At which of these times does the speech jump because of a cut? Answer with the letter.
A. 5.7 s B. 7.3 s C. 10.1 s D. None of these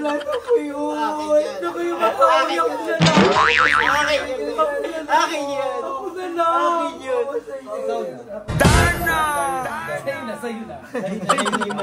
D